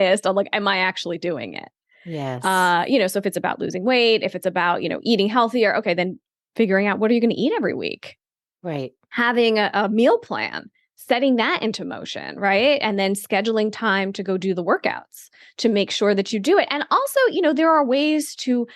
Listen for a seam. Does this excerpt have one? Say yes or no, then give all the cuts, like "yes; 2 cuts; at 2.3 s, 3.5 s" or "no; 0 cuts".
yes; 1 cut; at 6.2 s